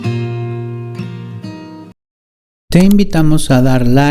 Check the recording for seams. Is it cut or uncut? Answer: cut